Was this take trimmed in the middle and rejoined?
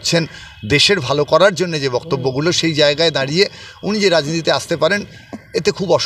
no; 0 cuts

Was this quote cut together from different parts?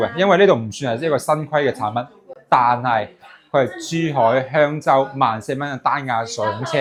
no; 0 cuts

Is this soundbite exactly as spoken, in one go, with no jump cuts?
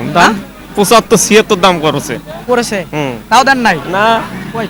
yes; 0 cuts

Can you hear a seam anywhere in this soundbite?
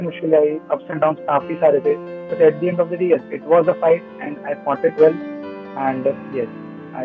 no; 0 cuts

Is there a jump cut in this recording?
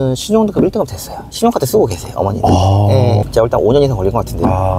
yes; 1 cut; at 3.2 s

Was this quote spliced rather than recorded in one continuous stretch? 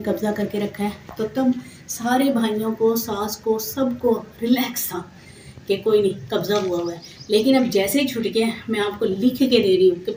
no; 0 cuts

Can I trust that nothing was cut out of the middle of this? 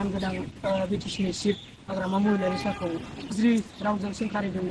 no; 1 cut; at 3.3 s

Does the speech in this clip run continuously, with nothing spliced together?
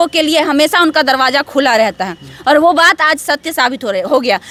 yes; 0 cuts

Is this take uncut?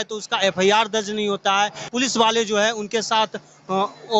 no; 1 cut; at 1.8 s

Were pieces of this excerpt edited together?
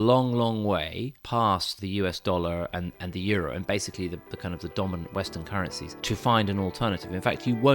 no; 0 cuts

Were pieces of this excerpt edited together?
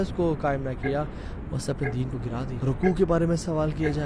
yes; 1 cut; at 2.6 s

